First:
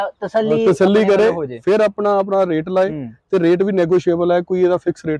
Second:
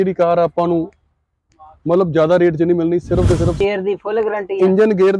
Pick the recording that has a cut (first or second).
second